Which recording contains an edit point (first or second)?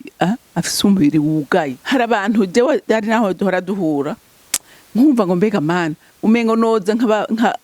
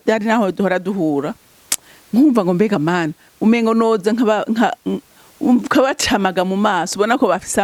first